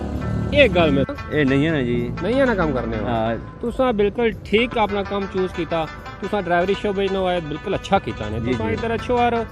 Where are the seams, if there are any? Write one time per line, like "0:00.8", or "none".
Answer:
0:01.1